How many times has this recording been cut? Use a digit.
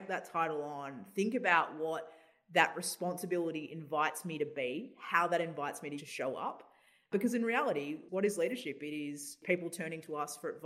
4